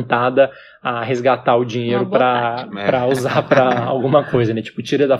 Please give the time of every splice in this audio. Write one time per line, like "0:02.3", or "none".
none

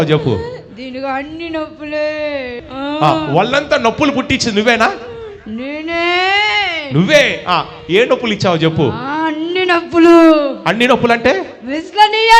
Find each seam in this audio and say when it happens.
0:02.6

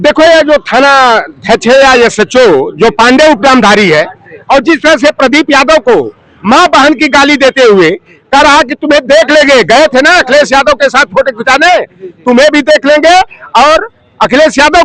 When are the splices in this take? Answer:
none

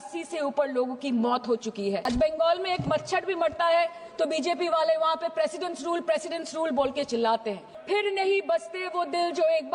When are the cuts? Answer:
0:02.1
0:07.7

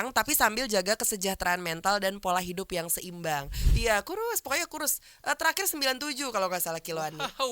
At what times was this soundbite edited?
0:03.6

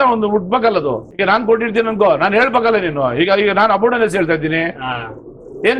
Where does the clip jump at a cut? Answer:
0:01.1

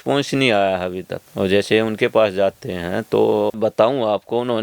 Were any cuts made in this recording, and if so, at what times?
0:03.6

